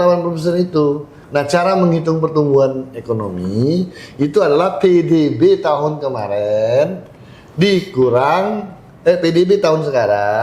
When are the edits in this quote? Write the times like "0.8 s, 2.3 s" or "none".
none